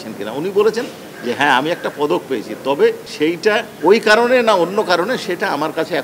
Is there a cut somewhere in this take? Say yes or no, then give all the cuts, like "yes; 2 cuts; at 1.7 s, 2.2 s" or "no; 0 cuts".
yes; 1 cut; at 3.1 s